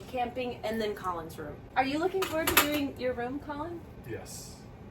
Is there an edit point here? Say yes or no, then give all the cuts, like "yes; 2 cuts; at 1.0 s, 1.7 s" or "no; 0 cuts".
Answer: yes; 2 cuts; at 1.6 s, 3.9 s